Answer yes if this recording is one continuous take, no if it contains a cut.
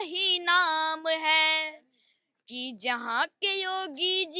yes